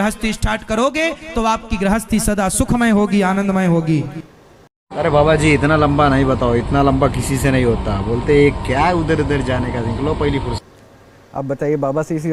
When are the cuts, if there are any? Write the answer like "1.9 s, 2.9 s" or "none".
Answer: none